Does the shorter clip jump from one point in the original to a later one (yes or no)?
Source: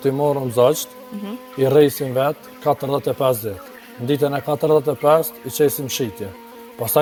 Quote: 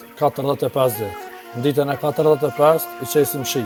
no